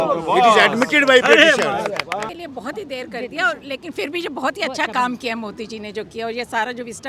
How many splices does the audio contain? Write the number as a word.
one